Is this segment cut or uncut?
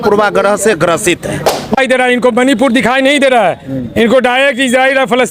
cut